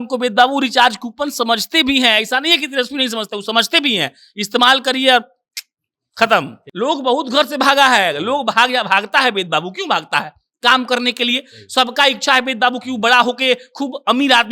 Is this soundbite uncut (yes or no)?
no